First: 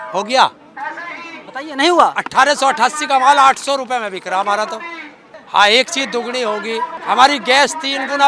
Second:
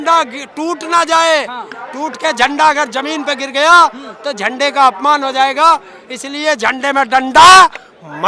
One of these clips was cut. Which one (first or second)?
first